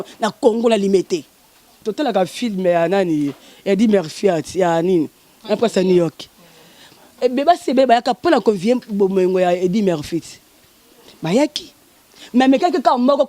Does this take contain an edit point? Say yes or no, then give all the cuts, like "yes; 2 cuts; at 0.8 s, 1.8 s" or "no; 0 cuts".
yes; 1 cut; at 1.7 s